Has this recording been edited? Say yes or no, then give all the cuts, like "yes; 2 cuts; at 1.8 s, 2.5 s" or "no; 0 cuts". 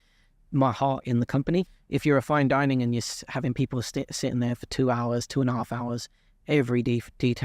yes; 1 cut; at 1.7 s